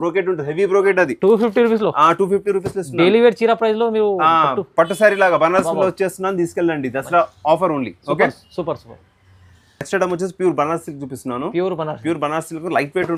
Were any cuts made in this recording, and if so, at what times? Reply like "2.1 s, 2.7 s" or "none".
none